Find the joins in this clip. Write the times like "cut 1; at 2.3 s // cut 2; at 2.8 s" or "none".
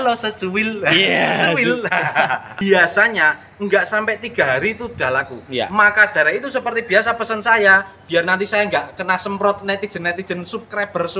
cut 1; at 2.5 s